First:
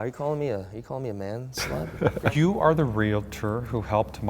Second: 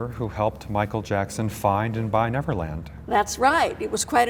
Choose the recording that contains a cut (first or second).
first